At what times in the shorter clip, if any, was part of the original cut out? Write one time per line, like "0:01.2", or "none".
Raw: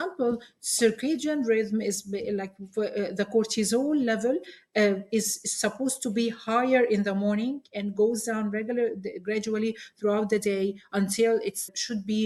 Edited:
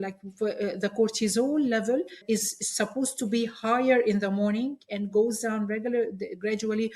0:02.2